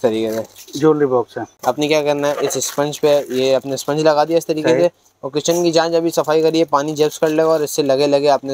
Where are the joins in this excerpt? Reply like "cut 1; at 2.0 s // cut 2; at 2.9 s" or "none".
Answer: cut 1; at 1.4 s